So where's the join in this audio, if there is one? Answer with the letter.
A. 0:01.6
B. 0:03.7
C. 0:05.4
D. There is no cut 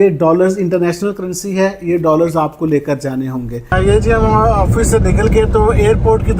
B